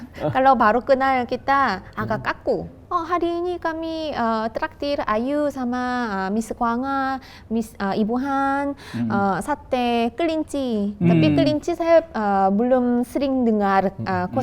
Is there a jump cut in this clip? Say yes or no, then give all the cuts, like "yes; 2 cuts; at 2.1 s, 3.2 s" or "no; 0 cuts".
yes; 1 cut; at 2.8 s